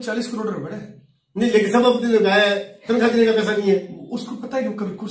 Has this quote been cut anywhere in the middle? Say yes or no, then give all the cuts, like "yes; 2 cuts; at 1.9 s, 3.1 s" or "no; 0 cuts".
no; 0 cuts